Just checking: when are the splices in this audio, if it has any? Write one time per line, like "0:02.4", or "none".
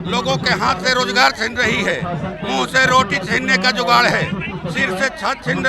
none